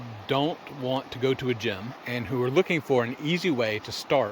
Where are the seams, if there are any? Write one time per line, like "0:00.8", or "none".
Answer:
0:01.9